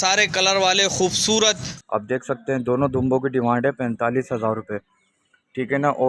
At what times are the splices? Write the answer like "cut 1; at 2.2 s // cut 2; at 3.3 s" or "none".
cut 1; at 1.7 s